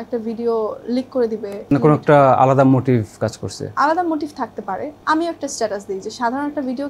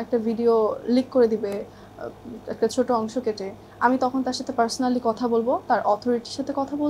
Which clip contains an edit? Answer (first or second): first